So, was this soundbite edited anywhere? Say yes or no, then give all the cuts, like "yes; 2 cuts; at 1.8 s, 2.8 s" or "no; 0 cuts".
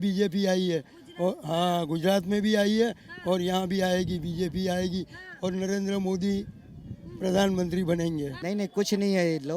yes; 1 cut; at 8.3 s